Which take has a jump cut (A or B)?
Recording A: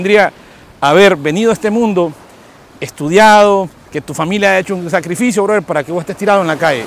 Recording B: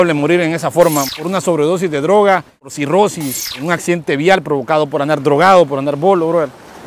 B